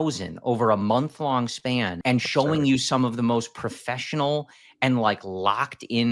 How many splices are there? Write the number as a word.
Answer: one